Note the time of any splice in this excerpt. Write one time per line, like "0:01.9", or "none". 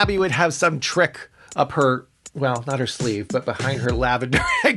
none